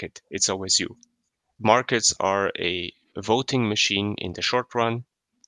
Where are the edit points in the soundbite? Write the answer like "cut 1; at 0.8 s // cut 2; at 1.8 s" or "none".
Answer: cut 1; at 1.5 s